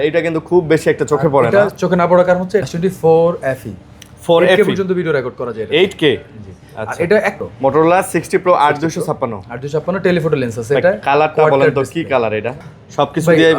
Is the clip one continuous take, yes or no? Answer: no